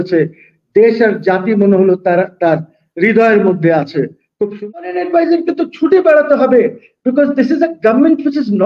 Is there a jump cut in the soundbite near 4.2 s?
yes; 1 cut; at 4.2 s

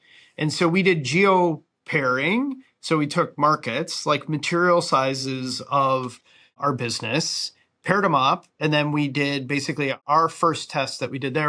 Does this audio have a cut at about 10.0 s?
yes; 1 cut; at 10.0 s

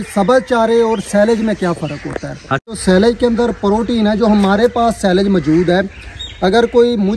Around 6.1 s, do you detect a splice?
no; 1 cut; at 2.8 s

